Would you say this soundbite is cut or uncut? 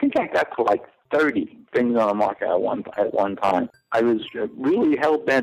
cut